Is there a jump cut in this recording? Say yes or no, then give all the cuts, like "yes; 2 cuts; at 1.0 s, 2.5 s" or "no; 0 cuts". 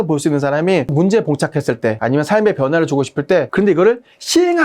yes; 2 cuts; at 0.9 s, 3.5 s